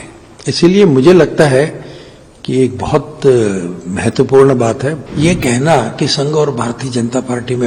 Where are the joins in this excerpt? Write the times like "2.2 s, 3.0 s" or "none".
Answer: 5.0 s